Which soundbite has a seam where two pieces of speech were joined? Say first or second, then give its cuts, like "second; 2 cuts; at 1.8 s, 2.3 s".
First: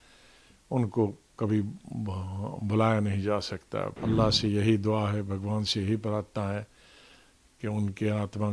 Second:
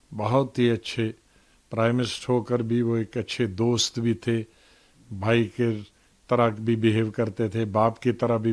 first; 1 cut; at 3.9 s